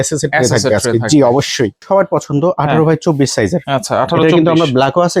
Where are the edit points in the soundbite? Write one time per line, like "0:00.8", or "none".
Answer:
0:01.8